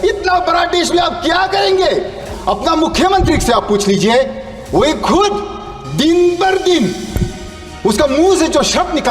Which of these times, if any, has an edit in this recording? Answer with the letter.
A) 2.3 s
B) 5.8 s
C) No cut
A